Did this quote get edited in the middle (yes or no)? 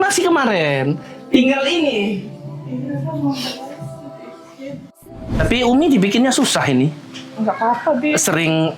yes